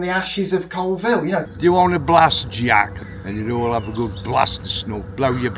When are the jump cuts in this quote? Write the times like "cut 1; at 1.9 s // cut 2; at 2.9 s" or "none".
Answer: cut 1; at 1.4 s // cut 2; at 2.9 s